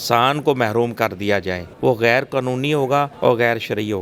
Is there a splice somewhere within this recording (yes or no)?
yes